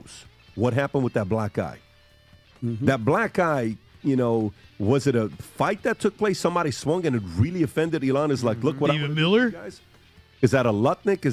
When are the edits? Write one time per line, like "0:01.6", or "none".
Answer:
none